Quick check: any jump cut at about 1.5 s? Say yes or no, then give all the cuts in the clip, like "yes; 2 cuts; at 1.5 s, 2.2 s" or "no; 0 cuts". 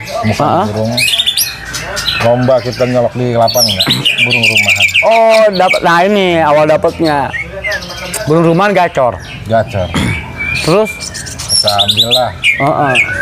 no; 0 cuts